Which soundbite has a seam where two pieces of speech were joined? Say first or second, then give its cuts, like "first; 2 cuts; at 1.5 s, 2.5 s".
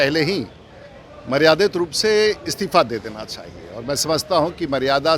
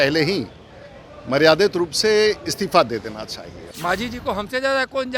second; 1 cut; at 3.7 s